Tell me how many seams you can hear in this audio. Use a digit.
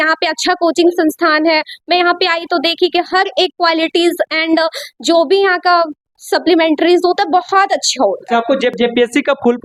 1